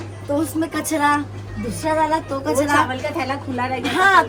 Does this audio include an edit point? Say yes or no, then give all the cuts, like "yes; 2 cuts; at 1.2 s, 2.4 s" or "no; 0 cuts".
no; 0 cuts